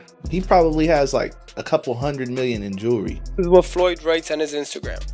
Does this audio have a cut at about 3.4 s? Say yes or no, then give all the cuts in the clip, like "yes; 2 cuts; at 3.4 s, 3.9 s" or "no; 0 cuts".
yes; 1 cut; at 3.4 s